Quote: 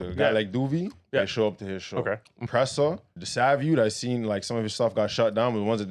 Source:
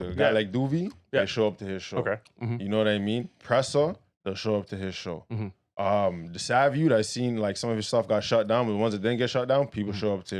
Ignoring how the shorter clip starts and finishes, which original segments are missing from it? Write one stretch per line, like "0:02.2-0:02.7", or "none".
0:02.4-0:03.3
0:04.1-0:06.3

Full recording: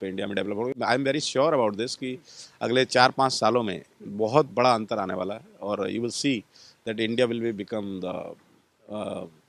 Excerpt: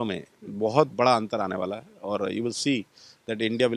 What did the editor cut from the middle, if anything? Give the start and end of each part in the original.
none

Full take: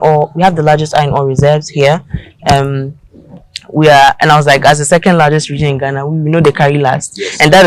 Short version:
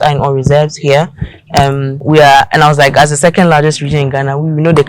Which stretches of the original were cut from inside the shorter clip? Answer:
0:02.8-0:03.6

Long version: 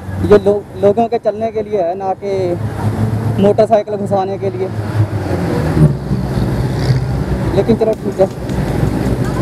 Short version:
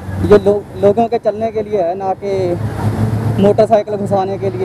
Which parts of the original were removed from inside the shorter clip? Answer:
none

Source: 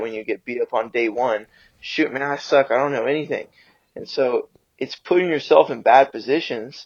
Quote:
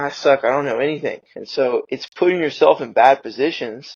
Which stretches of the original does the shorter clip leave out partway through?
0:04.0-0:04.6

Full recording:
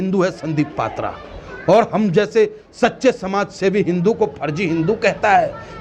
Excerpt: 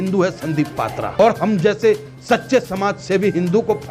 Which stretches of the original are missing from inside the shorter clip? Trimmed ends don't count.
0:01.2-0:01.7

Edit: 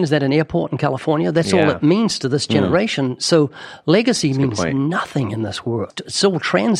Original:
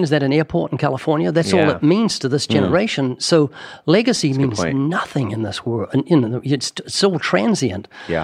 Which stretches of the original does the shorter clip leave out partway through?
0:05.9-0:06.7

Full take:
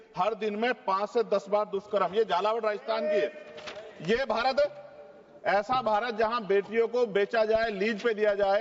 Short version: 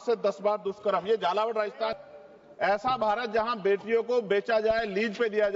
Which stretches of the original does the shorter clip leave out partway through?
0:03.0-0:04.8

